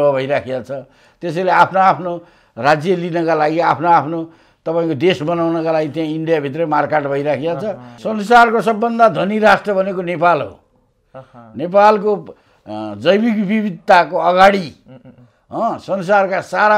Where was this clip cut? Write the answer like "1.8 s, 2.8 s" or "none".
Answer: 7.9 s